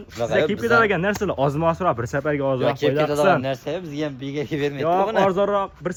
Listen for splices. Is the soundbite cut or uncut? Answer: uncut